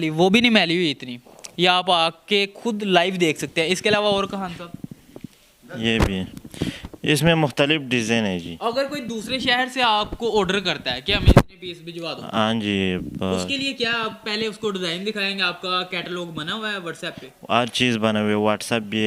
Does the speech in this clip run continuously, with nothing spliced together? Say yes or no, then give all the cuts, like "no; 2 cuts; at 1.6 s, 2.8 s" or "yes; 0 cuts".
yes; 0 cuts